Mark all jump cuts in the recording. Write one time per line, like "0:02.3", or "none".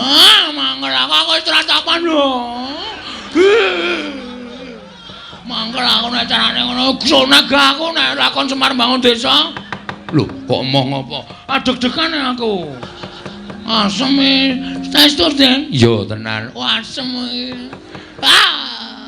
none